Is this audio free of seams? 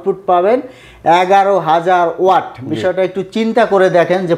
yes; 0 cuts

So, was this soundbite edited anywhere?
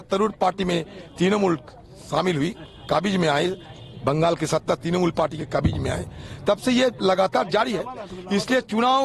no; 0 cuts

